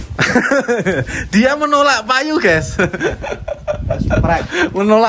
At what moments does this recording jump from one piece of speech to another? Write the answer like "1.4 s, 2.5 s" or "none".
none